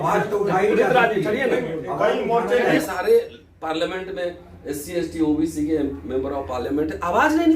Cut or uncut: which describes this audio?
cut